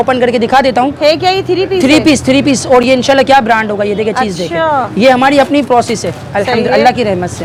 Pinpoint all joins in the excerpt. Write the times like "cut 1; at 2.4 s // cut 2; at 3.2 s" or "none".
none